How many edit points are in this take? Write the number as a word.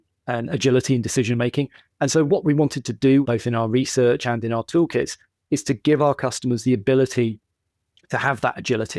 one